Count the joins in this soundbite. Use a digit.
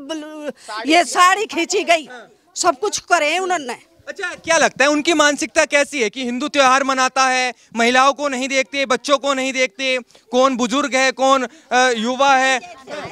0